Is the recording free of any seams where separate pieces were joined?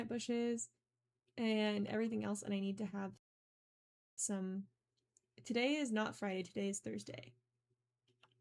yes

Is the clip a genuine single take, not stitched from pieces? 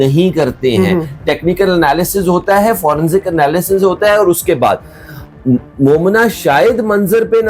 yes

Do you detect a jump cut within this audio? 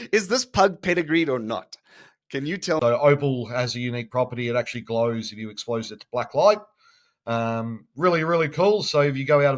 yes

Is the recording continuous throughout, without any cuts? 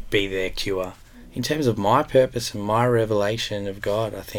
no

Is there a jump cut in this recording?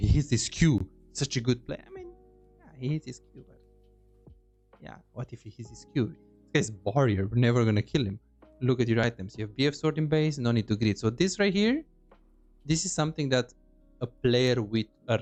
no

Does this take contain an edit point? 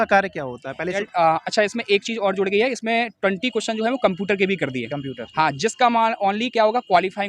yes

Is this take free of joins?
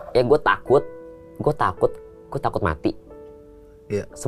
yes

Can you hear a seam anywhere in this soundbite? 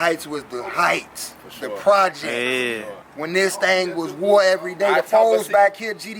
no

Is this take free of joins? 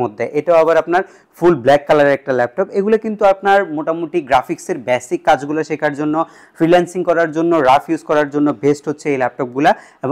yes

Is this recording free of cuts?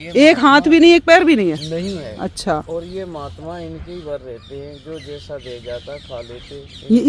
yes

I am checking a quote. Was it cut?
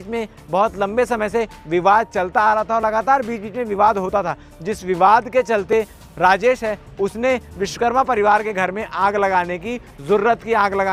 no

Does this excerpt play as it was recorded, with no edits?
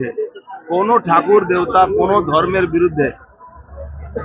yes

